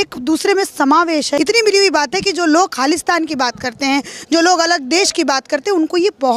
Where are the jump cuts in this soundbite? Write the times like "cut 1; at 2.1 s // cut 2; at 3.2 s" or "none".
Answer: cut 1; at 1.3 s